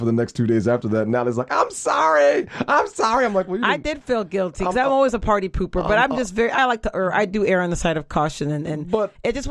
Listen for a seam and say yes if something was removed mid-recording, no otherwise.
no